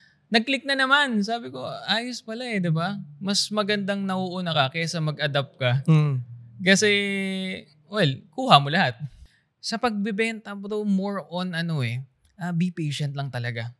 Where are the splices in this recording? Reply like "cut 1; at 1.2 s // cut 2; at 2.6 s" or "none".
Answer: cut 1; at 9.1 s